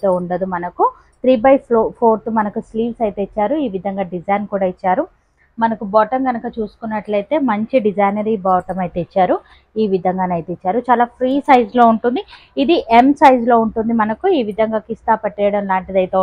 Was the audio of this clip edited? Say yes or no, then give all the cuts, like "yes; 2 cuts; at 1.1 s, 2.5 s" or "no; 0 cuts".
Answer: no; 0 cuts